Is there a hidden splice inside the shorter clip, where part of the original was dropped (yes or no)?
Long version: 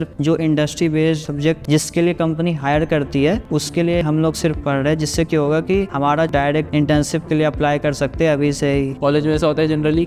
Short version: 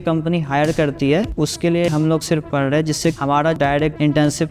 yes